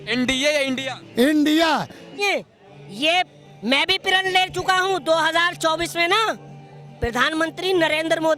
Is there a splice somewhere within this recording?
yes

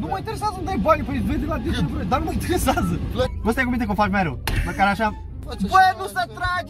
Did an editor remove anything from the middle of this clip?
yes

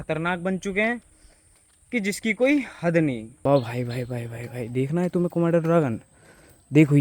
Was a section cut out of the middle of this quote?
yes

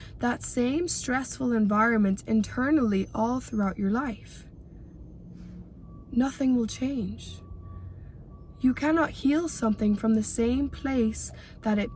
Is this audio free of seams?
yes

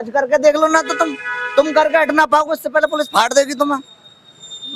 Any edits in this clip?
no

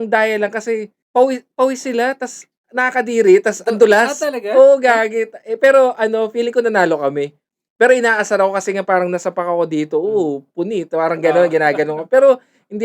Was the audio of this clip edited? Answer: yes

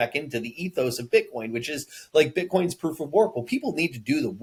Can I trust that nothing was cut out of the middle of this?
yes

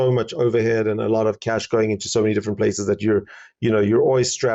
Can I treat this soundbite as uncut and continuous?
yes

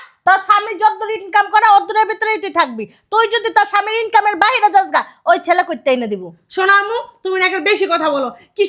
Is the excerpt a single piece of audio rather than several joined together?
yes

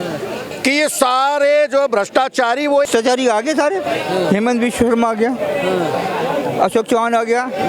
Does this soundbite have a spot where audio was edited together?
yes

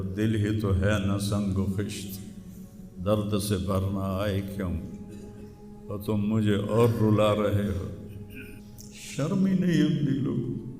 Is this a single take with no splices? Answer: no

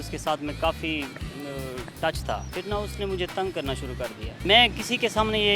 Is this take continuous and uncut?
no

